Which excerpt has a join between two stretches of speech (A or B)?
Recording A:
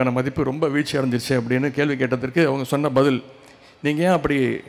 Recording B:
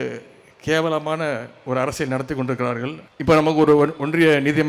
B